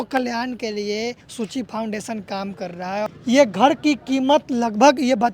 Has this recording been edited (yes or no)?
yes